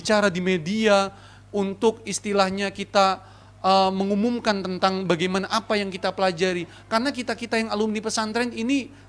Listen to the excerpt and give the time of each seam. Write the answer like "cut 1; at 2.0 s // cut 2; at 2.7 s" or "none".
none